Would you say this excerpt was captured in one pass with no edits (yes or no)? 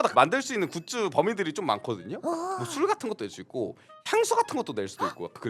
yes